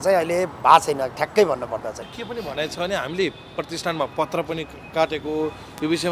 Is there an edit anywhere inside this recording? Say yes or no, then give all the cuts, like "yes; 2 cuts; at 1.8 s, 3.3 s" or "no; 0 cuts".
yes; 1 cut; at 2.1 s